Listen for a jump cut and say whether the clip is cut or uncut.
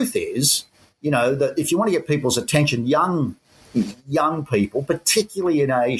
uncut